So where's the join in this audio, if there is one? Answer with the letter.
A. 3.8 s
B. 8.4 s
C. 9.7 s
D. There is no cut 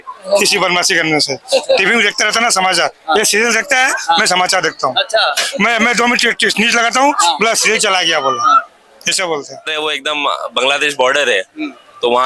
C